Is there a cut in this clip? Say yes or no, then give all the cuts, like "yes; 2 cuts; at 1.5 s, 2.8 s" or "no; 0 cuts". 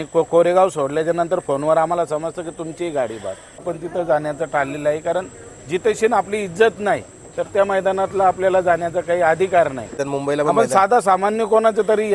yes; 2 cuts; at 3.7 s, 10.0 s